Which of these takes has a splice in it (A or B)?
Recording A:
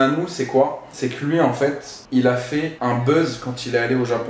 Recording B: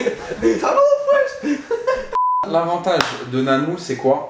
B